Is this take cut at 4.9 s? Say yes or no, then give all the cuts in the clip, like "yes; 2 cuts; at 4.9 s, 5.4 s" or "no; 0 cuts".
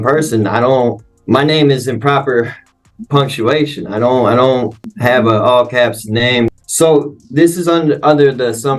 yes; 3 cuts; at 1.1 s, 4.9 s, 6.5 s